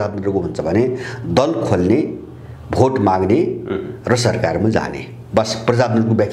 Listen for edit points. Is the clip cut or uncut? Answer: uncut